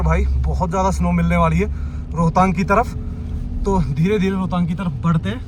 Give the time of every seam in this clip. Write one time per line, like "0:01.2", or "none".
none